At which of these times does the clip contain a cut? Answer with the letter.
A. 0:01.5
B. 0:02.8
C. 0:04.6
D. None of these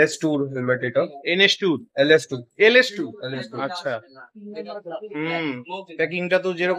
D